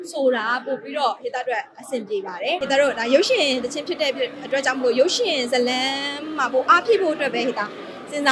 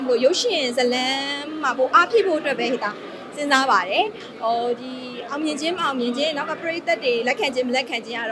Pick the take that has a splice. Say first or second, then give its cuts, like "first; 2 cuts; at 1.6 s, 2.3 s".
first; 1 cut; at 2.6 s